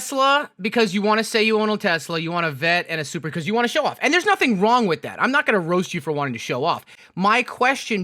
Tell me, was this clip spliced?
yes; 1 cut; at 6.9 s

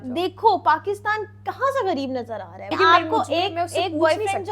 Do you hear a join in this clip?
yes; 1 cut; at 2.7 s

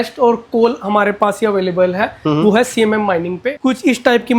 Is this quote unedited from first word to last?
no; 1 cut; at 3.5 s

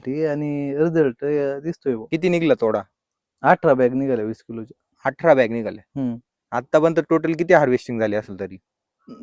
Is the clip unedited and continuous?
no; 1 cut; at 2.1 s

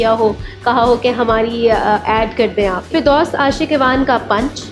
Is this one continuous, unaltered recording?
no; 1 cut; at 2.9 s

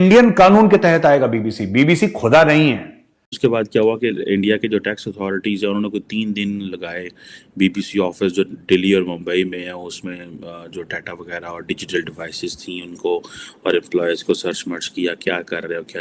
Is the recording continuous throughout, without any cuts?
no; 1 cut; at 3.4 s

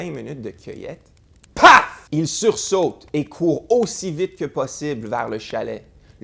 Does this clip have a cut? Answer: yes; 1 cut; at 2.0 s

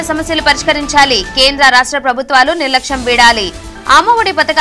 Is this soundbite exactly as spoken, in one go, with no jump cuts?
yes; 0 cuts

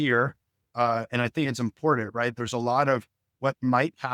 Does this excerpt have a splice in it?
no; 0 cuts

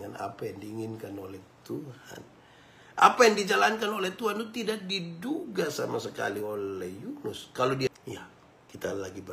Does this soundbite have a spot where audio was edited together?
yes; 1 cut; at 7.9 s

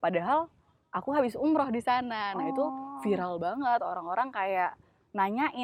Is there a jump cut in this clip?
no; 0 cuts

